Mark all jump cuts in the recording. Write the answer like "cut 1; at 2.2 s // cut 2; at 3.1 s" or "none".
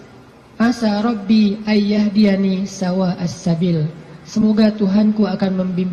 none